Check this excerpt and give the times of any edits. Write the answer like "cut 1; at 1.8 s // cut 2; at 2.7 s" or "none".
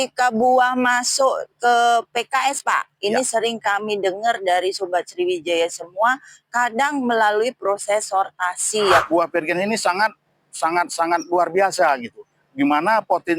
cut 1; at 9.0 s